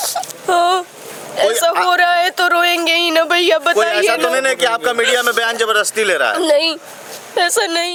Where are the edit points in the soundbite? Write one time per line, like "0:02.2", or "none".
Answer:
none